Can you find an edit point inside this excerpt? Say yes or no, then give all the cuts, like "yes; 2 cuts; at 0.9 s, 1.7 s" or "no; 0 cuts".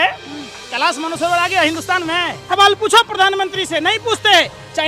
yes; 1 cut; at 2.5 s